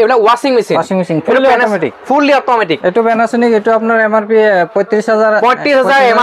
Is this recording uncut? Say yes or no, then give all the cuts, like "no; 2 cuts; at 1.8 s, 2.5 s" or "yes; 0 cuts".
yes; 0 cuts